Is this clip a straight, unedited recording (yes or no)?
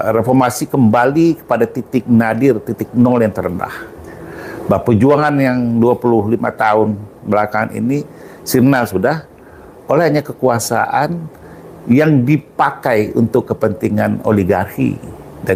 yes